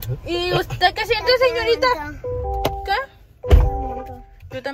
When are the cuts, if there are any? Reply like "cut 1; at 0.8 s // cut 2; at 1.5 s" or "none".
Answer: none